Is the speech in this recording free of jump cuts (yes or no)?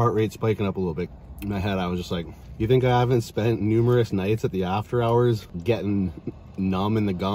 no